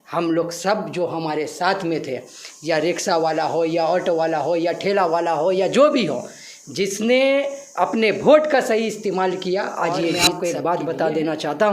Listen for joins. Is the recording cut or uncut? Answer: cut